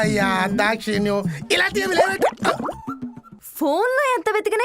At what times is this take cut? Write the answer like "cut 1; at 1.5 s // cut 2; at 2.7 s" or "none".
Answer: cut 1; at 3.4 s